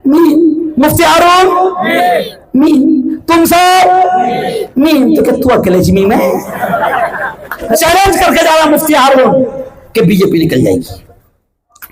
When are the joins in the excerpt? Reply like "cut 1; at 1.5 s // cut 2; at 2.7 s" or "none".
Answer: cut 1; at 7.7 s